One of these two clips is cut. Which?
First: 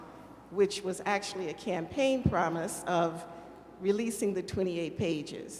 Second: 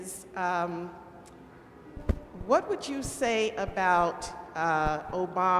second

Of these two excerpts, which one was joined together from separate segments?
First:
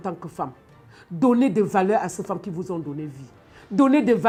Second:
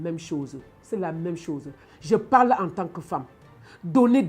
second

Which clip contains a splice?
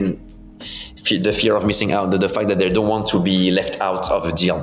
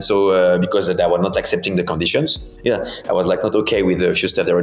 second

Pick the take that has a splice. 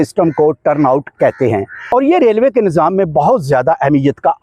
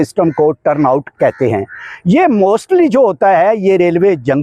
first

